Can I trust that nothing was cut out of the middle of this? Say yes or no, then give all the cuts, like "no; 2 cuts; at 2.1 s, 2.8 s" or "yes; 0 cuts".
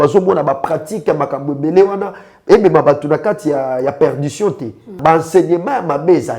no; 1 cut; at 4.9 s